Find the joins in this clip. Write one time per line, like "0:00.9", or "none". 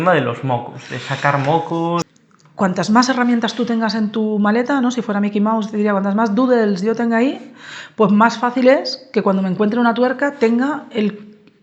0:02.1